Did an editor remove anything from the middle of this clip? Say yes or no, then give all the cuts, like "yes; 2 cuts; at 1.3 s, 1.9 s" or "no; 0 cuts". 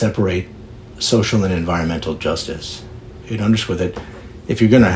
yes; 1 cut; at 0.9 s